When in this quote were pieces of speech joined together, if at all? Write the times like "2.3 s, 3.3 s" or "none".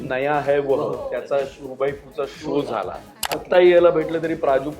3.4 s